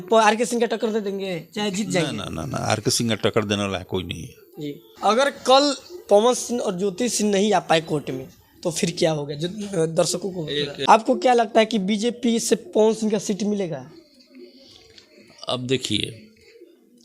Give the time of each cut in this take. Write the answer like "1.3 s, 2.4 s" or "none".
4.8 s, 10.8 s

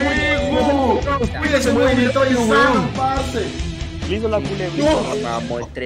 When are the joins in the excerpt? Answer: none

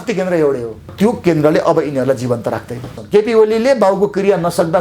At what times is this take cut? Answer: 0.9 s, 2.8 s

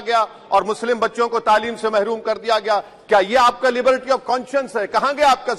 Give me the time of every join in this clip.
none

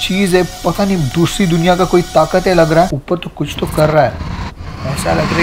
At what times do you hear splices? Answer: 3.0 s

